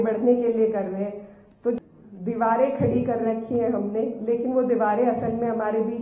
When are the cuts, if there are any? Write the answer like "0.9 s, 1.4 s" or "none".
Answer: 1.8 s